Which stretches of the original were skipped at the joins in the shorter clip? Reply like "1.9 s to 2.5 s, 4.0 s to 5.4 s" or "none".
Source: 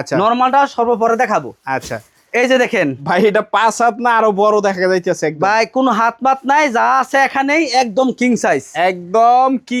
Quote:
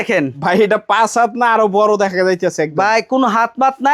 none